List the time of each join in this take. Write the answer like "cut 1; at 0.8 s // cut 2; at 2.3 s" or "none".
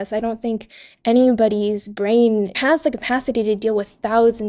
cut 1; at 2.6 s